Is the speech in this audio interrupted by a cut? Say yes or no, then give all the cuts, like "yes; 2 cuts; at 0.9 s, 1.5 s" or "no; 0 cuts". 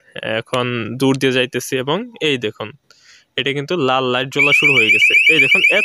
no; 0 cuts